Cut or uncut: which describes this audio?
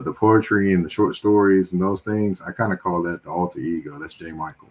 uncut